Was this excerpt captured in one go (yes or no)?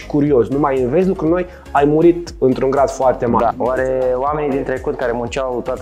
no